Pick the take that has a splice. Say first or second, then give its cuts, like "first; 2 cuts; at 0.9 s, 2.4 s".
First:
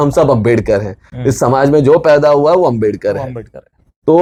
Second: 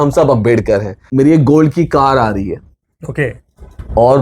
second; 1 cut; at 1.0 s